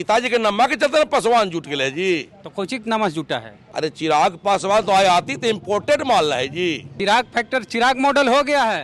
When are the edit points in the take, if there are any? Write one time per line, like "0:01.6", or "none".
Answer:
0:03.6
0:06.9